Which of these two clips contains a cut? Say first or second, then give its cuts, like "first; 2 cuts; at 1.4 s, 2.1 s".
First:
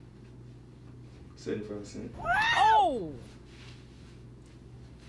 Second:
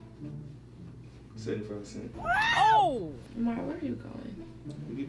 second; 1 cut; at 3.2 s